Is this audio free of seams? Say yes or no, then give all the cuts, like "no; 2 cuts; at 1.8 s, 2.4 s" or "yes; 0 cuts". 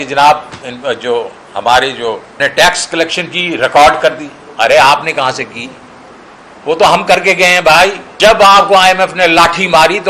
no; 2 cuts; at 2.3 s, 8.1 s